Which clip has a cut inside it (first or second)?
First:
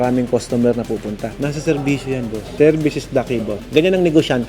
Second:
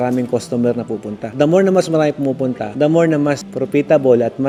first